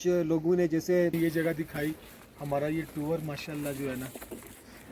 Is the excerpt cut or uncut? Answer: cut